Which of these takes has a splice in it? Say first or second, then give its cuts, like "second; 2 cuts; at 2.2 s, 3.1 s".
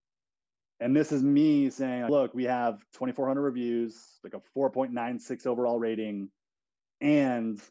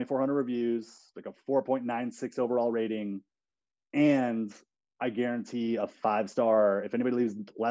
first; 1 cut; at 2.1 s